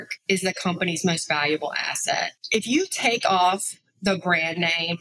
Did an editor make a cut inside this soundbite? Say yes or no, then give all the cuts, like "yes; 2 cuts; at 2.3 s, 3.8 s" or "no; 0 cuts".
yes; 1 cut; at 2.4 s